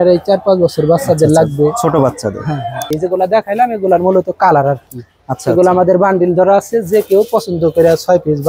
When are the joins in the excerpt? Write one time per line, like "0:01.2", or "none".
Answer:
0:02.9